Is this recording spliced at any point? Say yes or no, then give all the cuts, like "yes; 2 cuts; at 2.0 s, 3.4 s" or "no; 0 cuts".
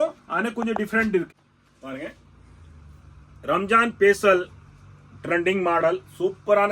yes; 1 cut; at 1.3 s